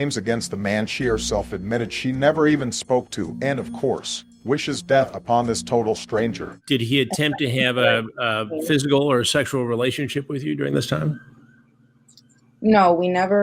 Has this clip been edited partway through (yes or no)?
yes